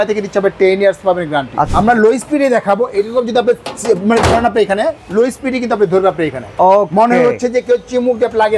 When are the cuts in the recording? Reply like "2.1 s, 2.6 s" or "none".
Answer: 1.7 s